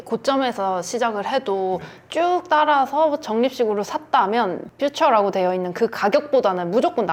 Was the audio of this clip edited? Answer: no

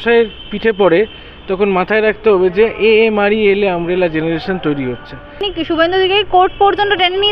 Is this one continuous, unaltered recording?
no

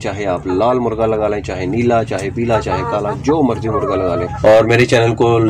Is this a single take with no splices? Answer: no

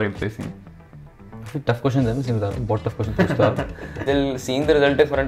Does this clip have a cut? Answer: yes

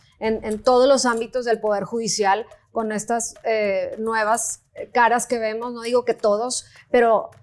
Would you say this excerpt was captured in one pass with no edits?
yes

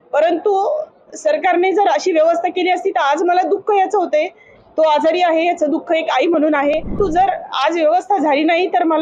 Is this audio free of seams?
no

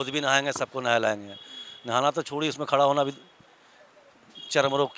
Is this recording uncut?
yes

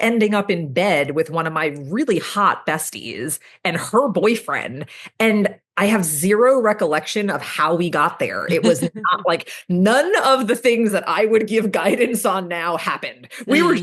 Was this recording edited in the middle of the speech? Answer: no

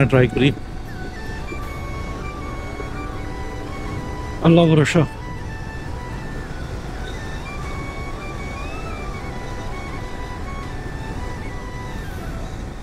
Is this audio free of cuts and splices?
yes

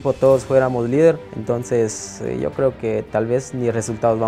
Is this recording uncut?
no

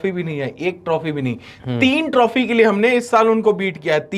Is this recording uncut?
yes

